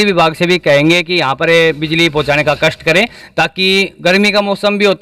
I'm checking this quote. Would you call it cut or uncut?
uncut